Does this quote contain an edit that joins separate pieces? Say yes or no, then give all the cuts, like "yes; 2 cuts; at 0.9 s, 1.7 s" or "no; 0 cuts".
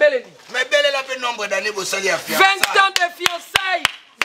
no; 0 cuts